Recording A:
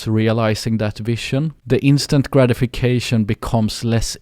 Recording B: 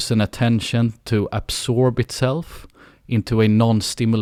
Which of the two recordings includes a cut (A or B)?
A